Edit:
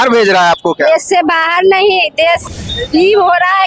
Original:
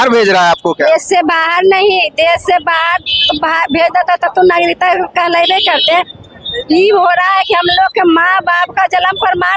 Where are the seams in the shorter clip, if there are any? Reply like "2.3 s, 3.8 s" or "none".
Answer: 2.4 s